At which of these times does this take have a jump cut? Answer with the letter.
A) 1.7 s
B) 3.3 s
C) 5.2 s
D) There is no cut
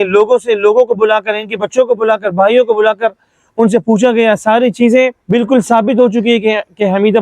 C